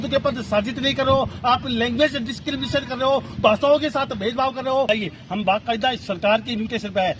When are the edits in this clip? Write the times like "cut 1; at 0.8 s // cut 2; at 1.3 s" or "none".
cut 1; at 4.9 s